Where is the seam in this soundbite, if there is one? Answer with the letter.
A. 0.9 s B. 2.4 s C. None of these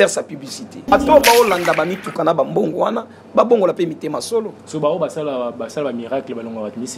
A